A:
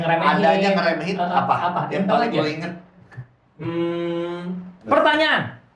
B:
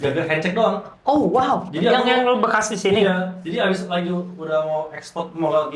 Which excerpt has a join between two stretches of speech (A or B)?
A